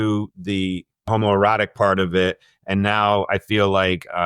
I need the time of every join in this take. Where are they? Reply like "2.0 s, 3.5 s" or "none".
1.1 s